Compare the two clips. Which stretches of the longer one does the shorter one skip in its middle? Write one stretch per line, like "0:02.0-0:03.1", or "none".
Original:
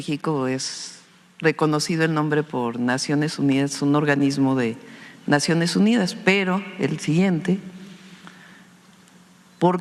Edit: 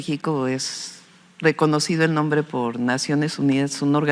none